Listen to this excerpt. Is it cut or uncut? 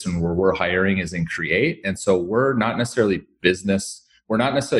uncut